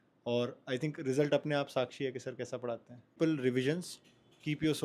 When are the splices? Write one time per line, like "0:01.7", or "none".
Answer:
0:03.2